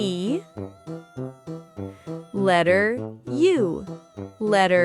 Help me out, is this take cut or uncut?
uncut